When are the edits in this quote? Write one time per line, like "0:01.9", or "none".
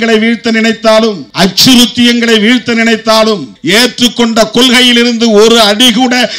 none